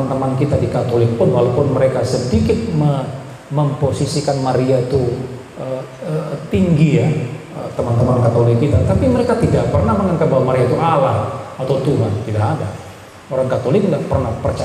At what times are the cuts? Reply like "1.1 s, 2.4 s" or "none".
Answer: none